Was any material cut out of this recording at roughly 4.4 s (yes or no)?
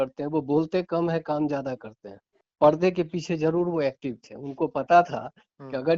no